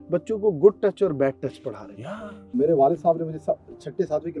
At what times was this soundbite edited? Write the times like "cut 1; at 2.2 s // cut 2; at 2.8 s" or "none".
cut 1; at 2.4 s